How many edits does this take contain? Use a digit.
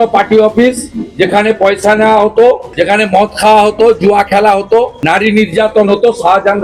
2